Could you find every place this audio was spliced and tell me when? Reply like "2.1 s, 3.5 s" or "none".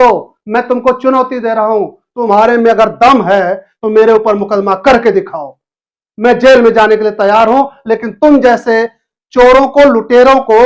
none